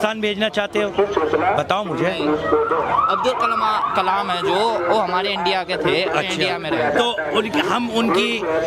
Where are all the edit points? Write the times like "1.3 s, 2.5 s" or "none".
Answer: none